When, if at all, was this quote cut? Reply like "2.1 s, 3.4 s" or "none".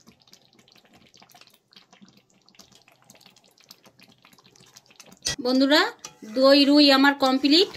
5.4 s